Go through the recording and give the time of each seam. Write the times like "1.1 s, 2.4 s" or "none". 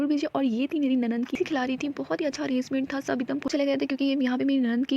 1.4 s, 3.5 s